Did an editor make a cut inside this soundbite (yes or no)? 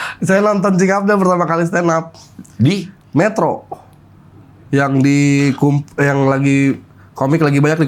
no